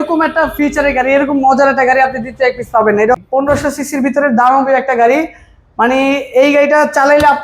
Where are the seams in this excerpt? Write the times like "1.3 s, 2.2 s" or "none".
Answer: 3.2 s